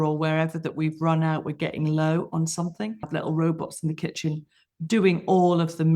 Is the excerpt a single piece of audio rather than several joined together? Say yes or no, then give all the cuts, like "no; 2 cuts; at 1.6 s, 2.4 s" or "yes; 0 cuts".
no; 1 cut; at 3.1 s